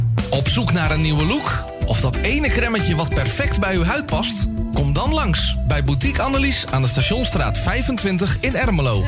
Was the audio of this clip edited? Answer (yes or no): no